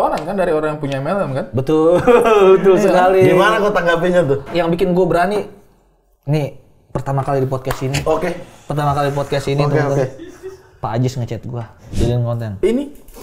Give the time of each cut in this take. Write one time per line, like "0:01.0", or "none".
0:04.5
0:11.9